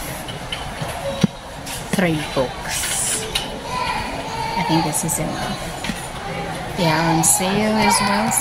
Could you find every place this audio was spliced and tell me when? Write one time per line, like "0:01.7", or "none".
none